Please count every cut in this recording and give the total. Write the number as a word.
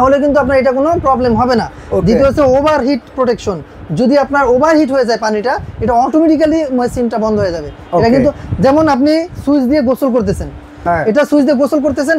zero